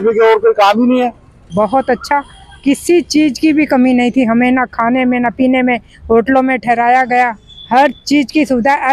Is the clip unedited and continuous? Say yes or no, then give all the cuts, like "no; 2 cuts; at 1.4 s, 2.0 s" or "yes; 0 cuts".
no; 1 cut; at 1.3 s